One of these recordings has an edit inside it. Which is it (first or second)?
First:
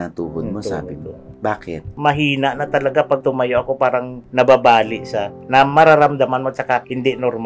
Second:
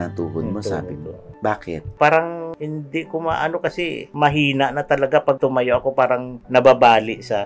first